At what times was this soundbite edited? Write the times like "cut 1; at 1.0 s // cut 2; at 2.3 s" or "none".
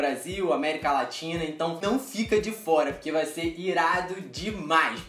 cut 1; at 1.7 s